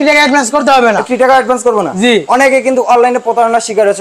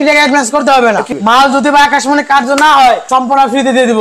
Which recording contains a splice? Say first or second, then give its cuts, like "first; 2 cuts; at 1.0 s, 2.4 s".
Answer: second; 1 cut; at 1.1 s